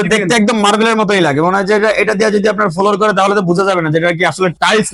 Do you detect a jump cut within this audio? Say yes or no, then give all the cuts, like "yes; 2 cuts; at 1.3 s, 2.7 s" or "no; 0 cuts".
no; 0 cuts